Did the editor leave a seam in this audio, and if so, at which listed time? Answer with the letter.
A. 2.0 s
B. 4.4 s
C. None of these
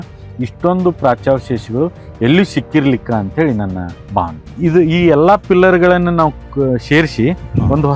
B